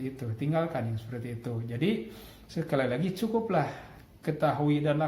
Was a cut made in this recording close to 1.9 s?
no; 0 cuts

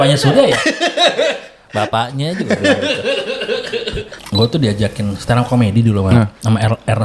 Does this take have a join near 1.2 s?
no; 1 cut; at 4.1 s

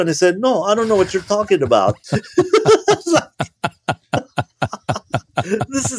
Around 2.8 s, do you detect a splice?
no; 0 cuts

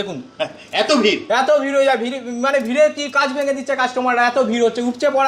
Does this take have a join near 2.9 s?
no; 0 cuts

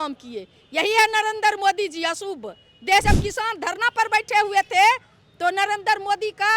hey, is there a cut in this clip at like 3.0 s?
yes; 1 cut; at 3.0 s

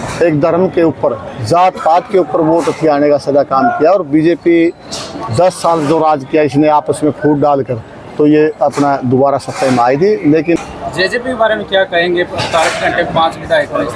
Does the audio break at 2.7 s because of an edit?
no; 1 cut; at 10.6 s

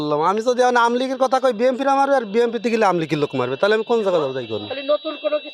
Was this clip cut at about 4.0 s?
no; 0 cuts

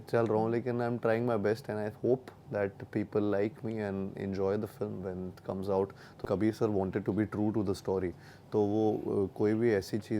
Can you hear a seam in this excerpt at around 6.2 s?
yes; 1 cut; at 6.2 s

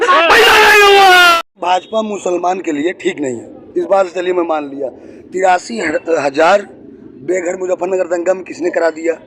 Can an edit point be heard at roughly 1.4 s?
yes; 1 cut; at 1.4 s

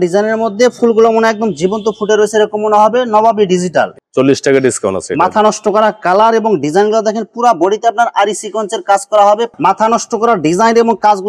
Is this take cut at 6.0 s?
no; 2 cuts; at 4.0 s, 9.5 s

